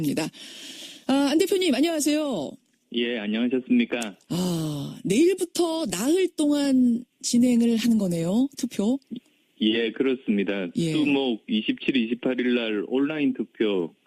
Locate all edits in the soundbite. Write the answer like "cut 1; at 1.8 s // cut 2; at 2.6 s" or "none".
cut 1; at 8.5 s